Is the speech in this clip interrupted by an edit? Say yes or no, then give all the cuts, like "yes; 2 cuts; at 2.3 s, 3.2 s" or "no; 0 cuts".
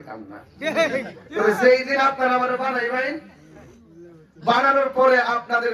no; 0 cuts